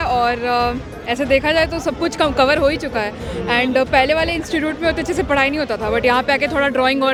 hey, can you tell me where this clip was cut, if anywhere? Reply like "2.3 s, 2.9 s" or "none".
none